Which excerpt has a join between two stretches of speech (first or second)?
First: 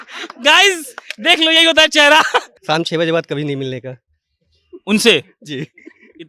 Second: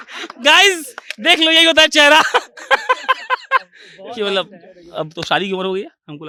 first